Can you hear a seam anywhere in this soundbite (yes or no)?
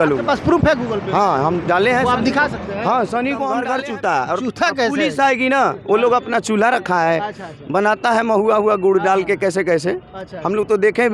yes